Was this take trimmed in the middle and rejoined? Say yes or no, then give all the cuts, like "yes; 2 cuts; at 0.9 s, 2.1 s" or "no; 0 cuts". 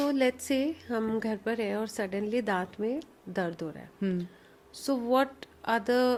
no; 0 cuts